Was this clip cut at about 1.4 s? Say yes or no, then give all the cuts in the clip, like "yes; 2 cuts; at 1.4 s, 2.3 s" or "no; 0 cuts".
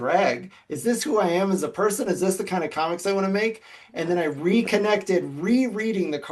no; 0 cuts